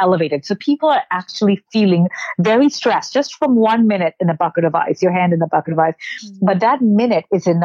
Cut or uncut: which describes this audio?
uncut